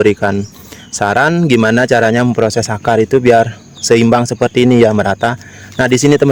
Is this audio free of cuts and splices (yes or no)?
yes